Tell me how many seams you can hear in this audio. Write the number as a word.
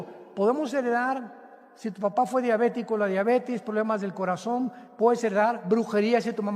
zero